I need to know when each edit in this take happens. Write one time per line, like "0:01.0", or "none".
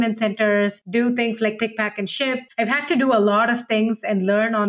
0:00.8
0:02.5